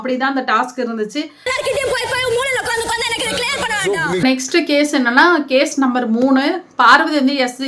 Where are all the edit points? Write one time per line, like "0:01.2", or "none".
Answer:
none

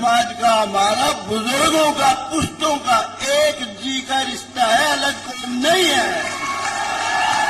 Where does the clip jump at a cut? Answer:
none

